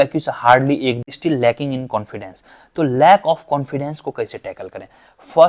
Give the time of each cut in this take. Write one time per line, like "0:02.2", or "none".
0:01.1